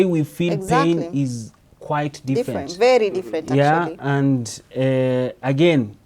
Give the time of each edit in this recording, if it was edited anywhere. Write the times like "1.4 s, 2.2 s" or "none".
none